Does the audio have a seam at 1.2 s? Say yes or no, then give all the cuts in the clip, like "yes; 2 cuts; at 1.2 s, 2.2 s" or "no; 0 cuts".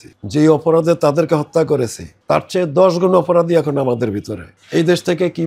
no; 1 cut; at 4.6 s